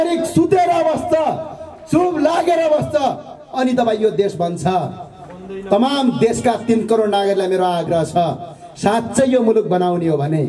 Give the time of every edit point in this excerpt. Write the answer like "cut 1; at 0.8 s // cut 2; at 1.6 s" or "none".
none

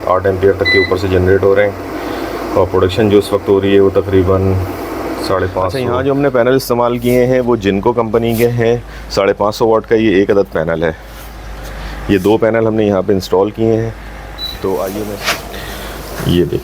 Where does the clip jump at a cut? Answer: cut 1; at 5.7 s // cut 2; at 15.2 s

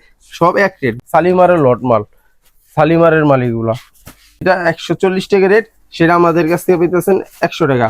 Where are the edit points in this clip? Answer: cut 1; at 0.9 s // cut 2; at 4.4 s

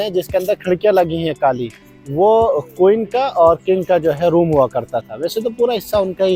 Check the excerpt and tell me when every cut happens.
none

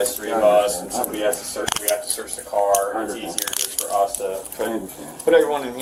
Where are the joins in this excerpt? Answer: none

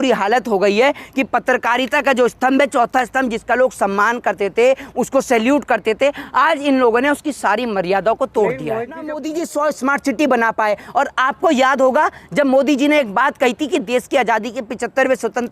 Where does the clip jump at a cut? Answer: cut 1; at 9.2 s

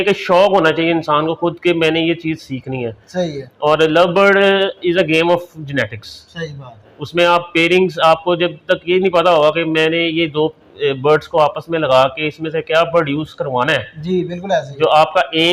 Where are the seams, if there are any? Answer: none

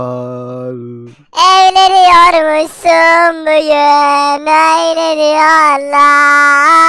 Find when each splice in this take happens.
none

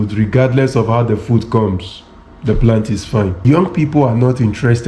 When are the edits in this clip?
cut 1; at 3.4 s

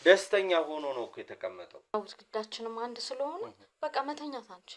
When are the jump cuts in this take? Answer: cut 1; at 1.9 s

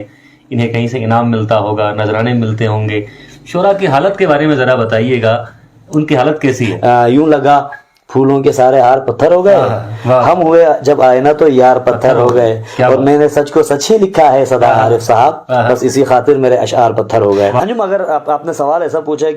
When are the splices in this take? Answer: cut 1; at 6.7 s // cut 2; at 17.6 s

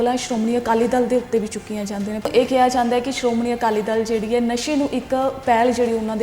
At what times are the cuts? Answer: cut 1; at 2.3 s

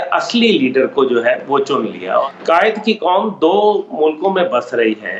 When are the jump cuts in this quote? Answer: cut 1; at 2.2 s

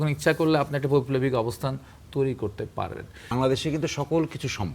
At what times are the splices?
cut 1; at 3.2 s

